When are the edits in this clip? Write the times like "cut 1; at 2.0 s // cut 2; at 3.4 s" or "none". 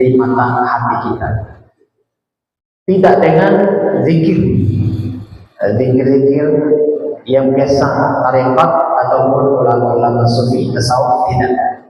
none